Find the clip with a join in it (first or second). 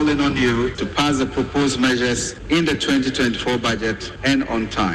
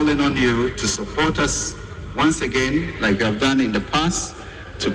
first